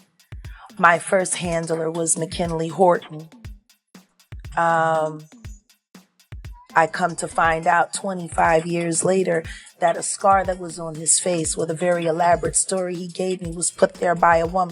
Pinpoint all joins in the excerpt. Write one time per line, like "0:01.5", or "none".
none